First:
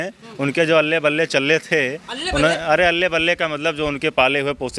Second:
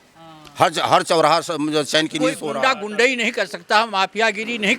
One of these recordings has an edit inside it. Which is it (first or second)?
second